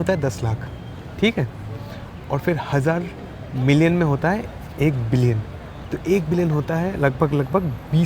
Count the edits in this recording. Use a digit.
0